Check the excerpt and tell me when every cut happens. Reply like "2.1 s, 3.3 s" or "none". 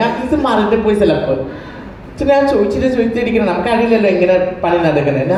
none